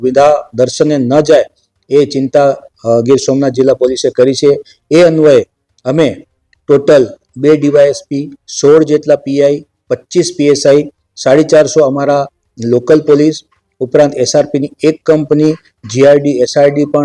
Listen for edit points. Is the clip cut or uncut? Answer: uncut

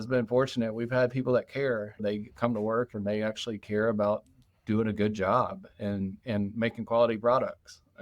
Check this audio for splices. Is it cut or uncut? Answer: cut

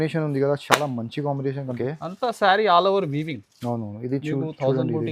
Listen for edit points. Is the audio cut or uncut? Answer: cut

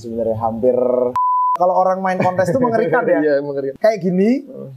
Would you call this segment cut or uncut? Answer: cut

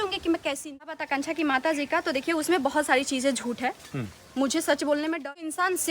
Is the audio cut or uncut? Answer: cut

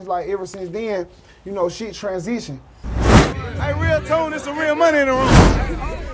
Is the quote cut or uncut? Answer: cut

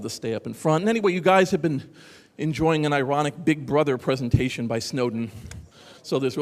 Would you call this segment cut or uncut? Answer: cut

